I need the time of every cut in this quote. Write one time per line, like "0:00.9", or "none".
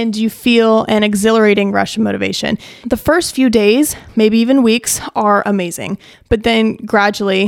0:02.8
0:06.1